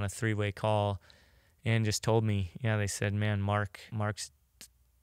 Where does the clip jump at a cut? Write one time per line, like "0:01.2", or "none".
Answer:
0:03.8